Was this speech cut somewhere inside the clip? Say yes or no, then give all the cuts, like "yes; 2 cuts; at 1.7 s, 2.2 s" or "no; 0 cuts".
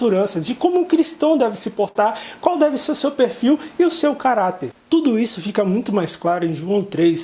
no; 0 cuts